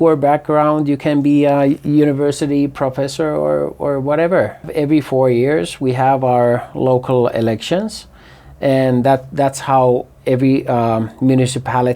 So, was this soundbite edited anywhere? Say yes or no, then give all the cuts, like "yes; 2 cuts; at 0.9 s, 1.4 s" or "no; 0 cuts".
yes; 1 cut; at 4.7 s